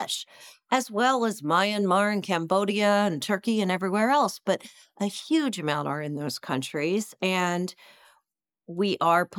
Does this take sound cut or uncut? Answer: uncut